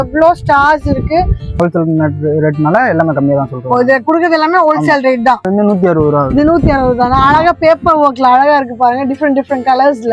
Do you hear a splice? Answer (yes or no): yes